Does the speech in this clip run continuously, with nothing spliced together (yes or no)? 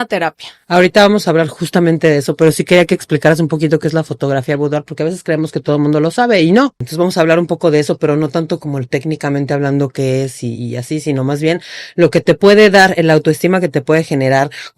no